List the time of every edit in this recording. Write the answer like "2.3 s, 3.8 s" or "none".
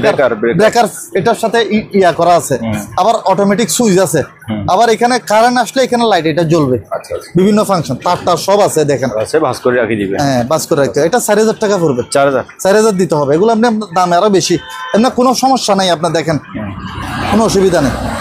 none